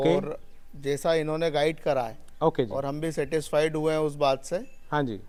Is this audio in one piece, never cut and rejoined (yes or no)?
yes